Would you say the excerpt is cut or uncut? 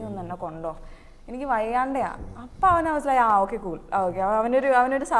uncut